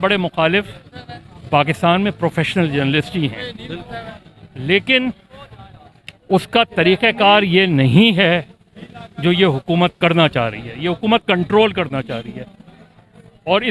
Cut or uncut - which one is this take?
uncut